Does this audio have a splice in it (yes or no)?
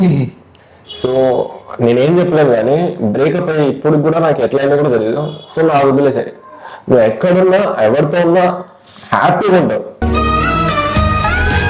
no